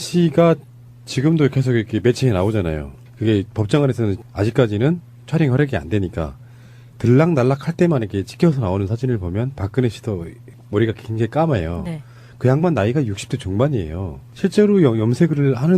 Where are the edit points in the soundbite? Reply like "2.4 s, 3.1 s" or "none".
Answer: 6.5 s